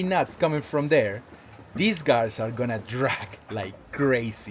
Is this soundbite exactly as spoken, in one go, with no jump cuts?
yes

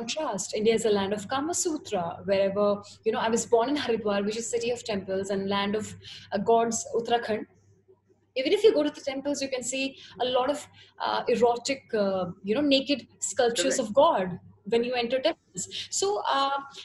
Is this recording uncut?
yes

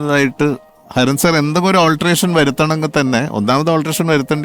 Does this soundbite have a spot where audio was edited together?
no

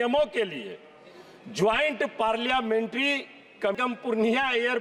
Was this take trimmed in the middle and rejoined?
yes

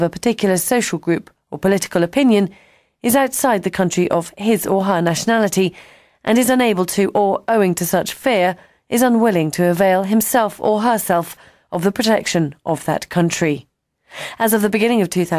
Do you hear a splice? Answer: yes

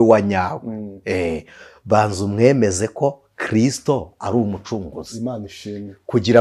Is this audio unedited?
yes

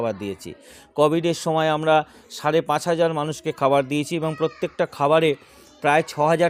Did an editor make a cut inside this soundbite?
no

